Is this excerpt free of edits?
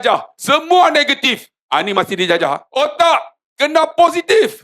no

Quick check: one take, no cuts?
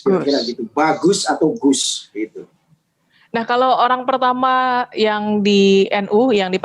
yes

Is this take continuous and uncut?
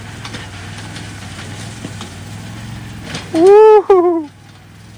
yes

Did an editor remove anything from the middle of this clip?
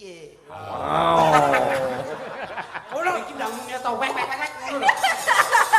yes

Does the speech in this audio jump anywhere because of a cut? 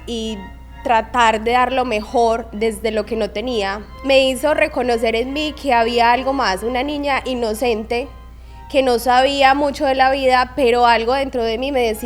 yes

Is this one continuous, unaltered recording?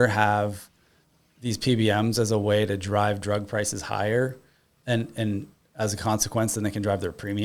yes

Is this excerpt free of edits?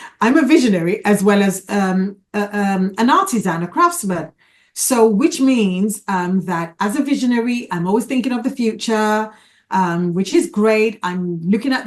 yes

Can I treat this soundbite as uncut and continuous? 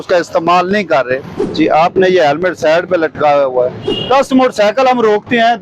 no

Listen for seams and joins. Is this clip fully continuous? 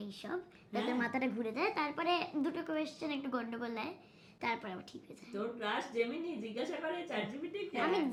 yes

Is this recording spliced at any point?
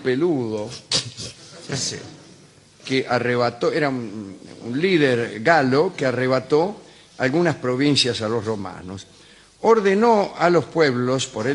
yes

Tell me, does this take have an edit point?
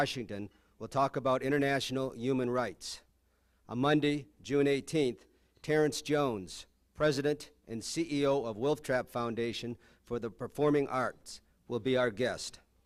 no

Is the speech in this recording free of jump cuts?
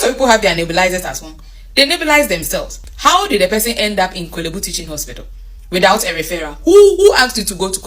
no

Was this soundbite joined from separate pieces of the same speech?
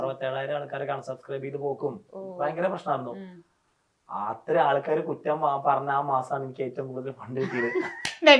no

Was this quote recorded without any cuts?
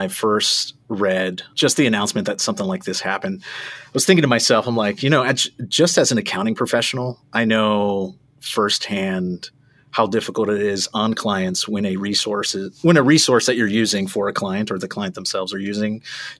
no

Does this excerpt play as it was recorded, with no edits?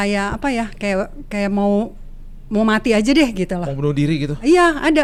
yes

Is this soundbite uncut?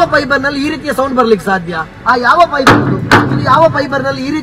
yes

